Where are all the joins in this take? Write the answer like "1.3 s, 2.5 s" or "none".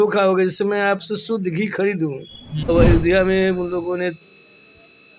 2.6 s